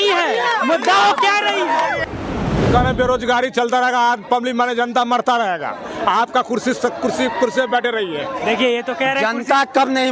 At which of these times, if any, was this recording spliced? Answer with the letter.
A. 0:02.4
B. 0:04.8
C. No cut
A